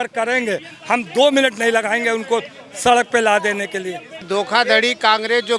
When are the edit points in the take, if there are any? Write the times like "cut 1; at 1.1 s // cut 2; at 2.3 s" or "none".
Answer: cut 1; at 4.3 s